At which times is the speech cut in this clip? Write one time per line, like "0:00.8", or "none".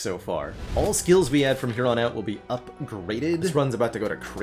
0:03.5